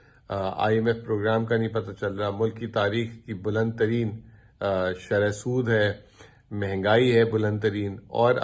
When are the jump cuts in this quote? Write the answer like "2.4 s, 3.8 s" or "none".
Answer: none